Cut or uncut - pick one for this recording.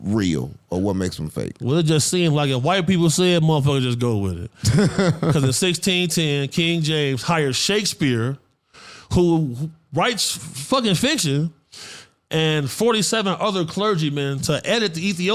uncut